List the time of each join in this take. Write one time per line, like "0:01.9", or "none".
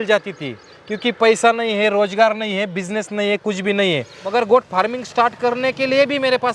0:04.2